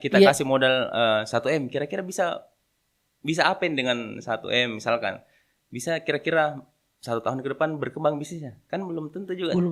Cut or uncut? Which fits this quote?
uncut